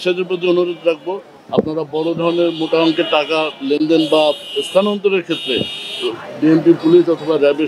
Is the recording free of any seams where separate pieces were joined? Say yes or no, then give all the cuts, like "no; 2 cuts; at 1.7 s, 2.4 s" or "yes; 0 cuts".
yes; 0 cuts